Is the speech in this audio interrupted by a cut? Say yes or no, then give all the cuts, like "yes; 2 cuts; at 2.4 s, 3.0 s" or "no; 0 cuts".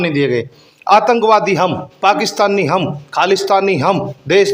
no; 0 cuts